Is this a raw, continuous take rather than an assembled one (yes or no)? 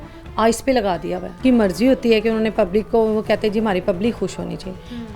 no